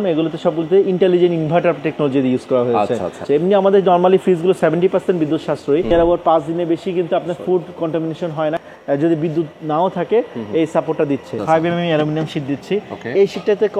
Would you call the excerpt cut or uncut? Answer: cut